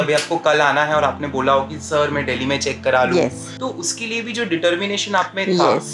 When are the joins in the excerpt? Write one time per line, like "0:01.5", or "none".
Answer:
0:03.5

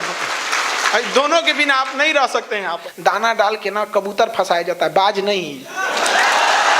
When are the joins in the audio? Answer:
0:02.9

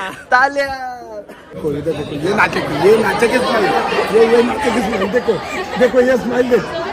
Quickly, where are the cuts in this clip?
0:01.6

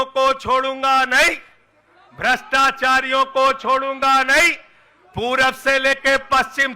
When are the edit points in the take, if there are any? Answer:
none

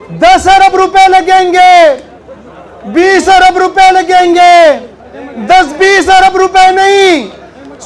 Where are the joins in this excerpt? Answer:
none

